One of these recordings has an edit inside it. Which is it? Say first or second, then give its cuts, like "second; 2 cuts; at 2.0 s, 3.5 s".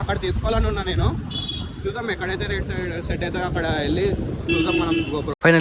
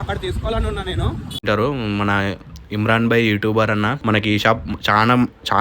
second; 1 cut; at 1.4 s